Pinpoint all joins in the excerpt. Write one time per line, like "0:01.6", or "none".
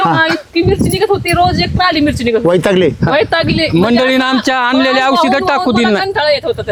none